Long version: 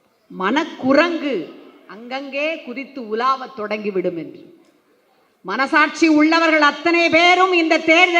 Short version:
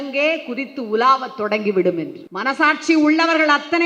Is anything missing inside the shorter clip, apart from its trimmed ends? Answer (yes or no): yes